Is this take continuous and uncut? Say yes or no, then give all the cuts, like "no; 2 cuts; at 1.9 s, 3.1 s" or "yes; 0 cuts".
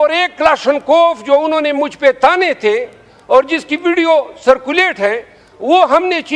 yes; 0 cuts